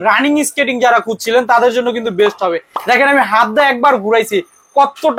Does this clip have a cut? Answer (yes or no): no